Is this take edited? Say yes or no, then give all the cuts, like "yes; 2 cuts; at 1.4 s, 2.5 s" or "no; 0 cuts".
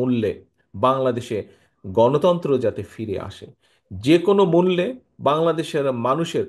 no; 0 cuts